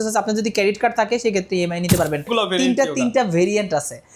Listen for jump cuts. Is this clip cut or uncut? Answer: cut